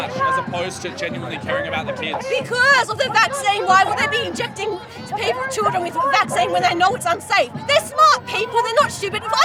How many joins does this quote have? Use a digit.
0